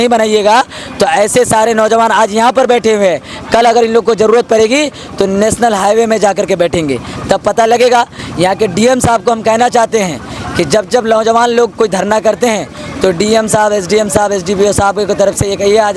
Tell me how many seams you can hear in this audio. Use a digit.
0